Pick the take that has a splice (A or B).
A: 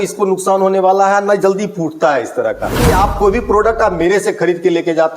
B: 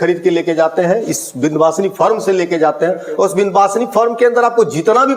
A